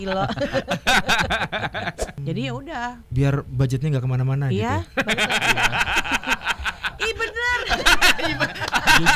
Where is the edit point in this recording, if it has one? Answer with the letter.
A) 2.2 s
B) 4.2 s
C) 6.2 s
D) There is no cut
A